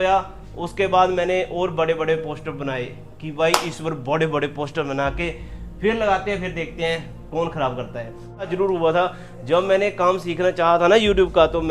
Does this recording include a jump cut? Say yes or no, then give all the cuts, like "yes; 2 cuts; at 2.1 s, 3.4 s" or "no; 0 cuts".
yes; 1 cut; at 8.4 s